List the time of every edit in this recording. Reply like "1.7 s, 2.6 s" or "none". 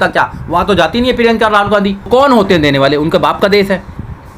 2.1 s